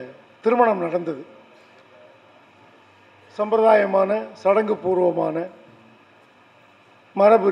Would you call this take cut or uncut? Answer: uncut